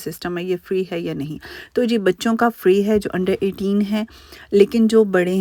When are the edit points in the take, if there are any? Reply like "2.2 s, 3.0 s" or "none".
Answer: none